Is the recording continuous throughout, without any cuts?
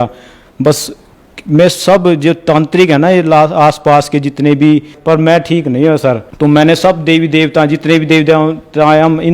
no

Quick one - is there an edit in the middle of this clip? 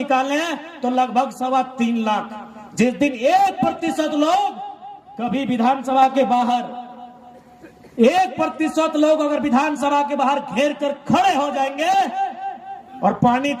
no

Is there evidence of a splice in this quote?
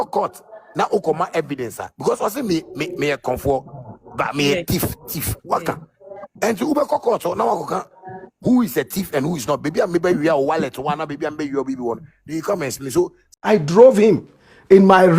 yes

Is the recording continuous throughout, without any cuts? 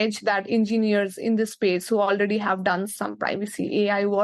no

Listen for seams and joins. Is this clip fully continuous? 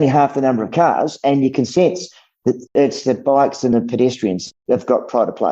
no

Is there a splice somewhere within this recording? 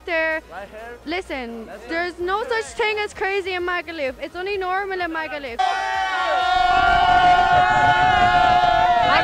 no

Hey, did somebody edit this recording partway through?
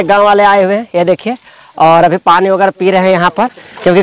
no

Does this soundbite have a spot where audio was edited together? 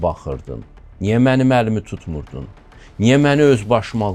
no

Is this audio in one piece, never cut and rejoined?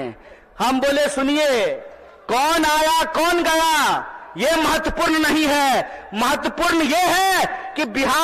yes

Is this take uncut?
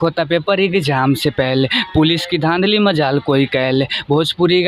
yes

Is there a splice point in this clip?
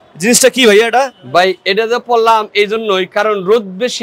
no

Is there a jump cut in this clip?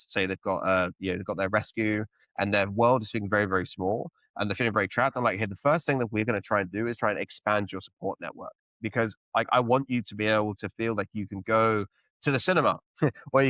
no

